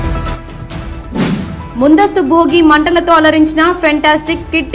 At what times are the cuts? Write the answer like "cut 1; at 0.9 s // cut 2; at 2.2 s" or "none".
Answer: cut 1; at 1.2 s